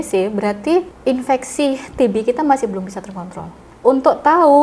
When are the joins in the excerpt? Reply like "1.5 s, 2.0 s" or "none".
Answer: 0.9 s, 3.5 s